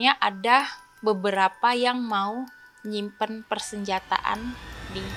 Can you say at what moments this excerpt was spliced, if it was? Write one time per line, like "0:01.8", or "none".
none